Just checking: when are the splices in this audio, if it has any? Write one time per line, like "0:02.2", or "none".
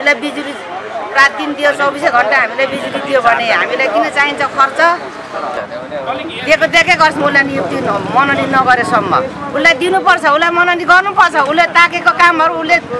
0:05.6